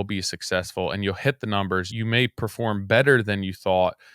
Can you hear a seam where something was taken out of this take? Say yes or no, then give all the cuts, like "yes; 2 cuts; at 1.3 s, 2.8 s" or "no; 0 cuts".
yes; 1 cut; at 1.9 s